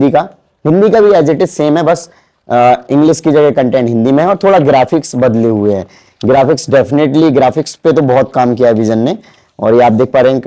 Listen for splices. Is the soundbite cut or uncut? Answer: uncut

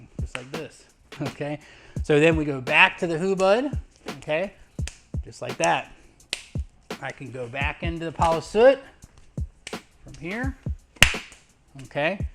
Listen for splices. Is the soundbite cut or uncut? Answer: cut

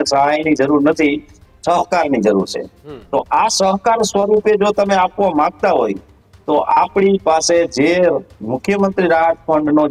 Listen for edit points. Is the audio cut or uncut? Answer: uncut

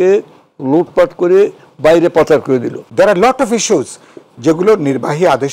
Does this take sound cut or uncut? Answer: cut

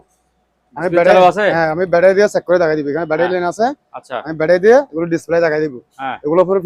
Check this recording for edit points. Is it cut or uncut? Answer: uncut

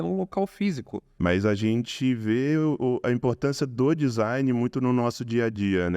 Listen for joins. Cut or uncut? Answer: cut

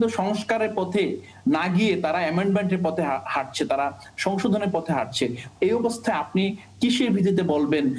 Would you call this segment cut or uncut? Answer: uncut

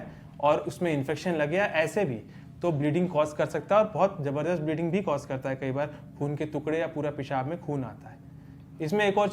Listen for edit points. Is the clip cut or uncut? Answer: uncut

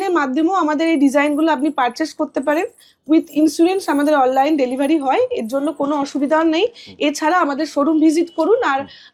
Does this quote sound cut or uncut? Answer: uncut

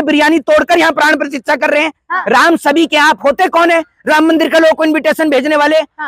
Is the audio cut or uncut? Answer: cut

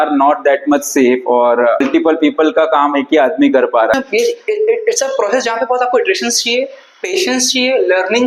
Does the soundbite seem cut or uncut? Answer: cut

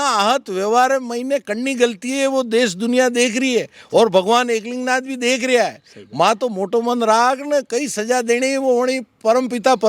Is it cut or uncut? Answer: uncut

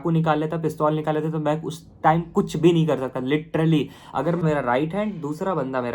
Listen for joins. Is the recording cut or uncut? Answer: cut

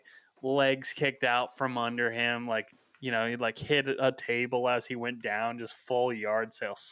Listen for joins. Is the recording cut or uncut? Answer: uncut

